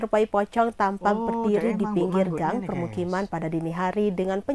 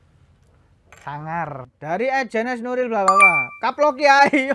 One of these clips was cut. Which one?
second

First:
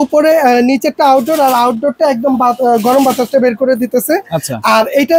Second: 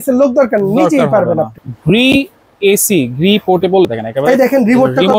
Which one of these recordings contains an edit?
second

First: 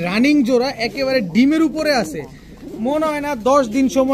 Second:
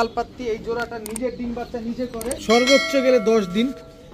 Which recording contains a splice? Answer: second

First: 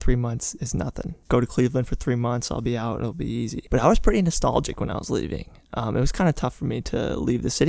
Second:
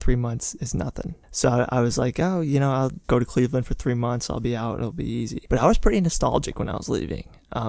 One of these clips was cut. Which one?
first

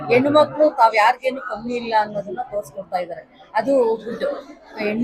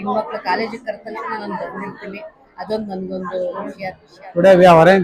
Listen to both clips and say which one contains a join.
second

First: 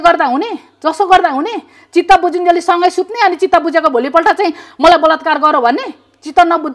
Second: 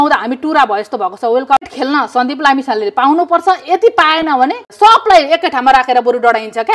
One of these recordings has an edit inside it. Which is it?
second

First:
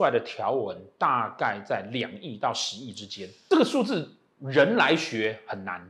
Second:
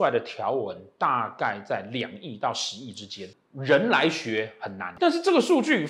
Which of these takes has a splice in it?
second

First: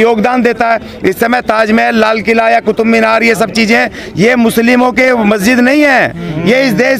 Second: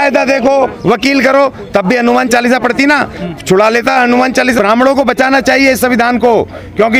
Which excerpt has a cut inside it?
second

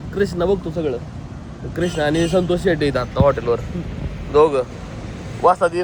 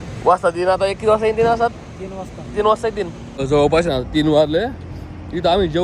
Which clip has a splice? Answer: second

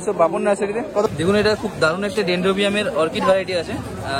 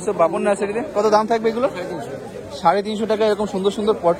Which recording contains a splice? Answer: first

